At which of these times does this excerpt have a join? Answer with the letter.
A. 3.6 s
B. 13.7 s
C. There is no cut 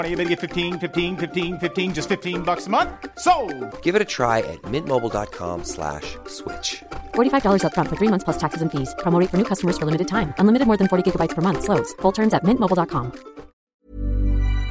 B